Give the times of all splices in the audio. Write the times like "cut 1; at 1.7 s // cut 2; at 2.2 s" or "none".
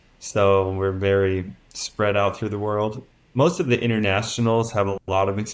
cut 1; at 3.0 s